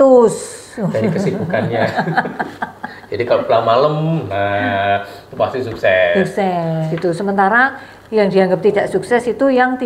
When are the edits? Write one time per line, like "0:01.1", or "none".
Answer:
0:06.9